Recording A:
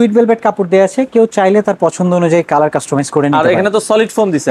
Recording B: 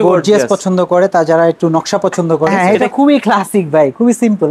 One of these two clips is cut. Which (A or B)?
B